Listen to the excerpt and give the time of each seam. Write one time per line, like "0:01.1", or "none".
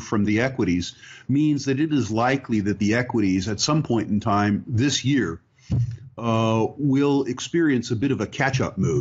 0:08.1